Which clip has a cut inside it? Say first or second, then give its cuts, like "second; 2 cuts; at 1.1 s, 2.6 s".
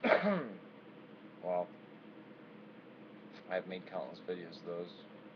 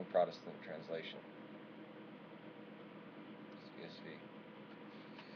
first; 1 cut; at 2.8 s